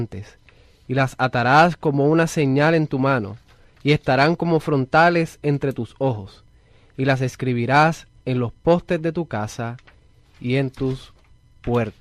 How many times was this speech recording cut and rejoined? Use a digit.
0